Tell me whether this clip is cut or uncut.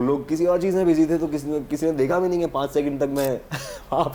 uncut